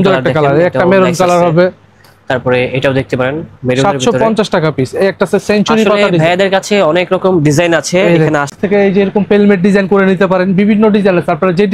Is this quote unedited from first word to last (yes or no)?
no